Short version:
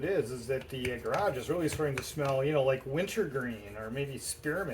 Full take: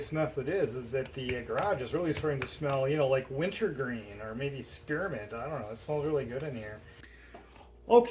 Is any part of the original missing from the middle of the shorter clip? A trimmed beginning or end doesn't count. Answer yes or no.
no